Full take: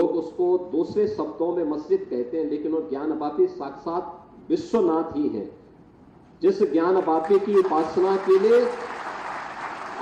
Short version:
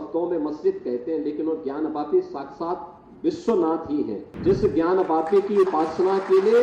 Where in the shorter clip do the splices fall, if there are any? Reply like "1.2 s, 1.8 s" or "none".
4.2 s

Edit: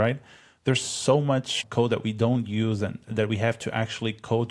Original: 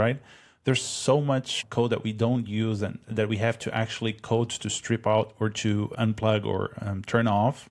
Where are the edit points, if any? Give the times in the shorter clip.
none

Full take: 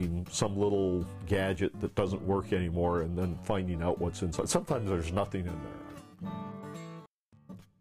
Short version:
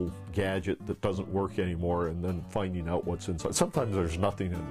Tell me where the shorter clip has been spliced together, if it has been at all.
none

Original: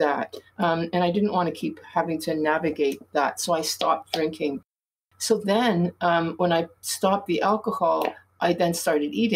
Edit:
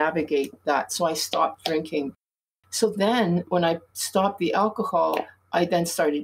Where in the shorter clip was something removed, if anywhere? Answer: 3.5 s

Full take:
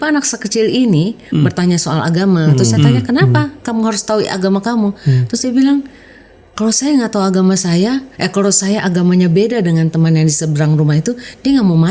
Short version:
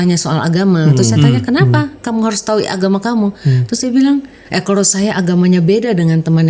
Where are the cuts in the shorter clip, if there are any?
4.5 s

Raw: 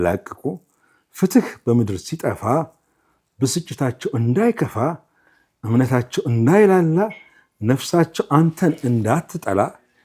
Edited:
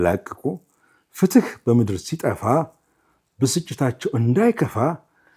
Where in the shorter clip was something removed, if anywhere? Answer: none

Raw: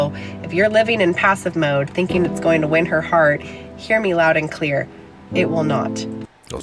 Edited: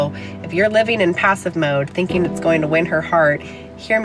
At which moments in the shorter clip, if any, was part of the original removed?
none

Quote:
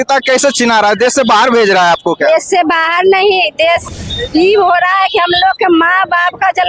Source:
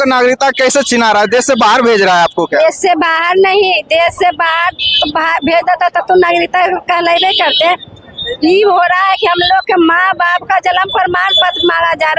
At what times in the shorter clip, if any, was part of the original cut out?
3.8 s

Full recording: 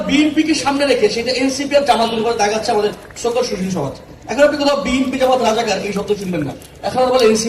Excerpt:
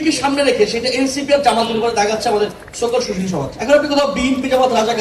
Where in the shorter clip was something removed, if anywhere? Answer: 3.5 s

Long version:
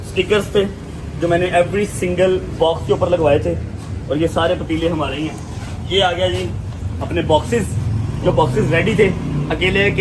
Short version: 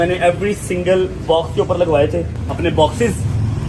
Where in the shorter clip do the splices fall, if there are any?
2.4 s

